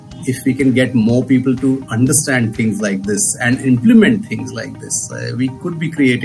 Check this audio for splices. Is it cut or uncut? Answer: uncut